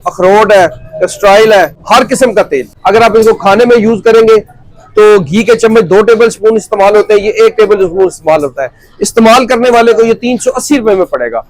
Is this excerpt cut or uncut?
cut